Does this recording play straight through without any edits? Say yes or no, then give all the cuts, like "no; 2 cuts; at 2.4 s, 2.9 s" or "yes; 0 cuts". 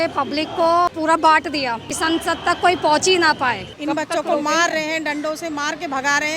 no; 3 cuts; at 0.9 s, 1.9 s, 3.7 s